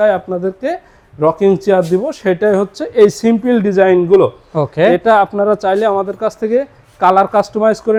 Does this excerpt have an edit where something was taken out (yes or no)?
no